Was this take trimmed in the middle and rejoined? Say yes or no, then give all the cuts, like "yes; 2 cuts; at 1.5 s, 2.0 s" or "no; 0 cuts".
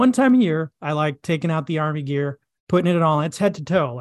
no; 0 cuts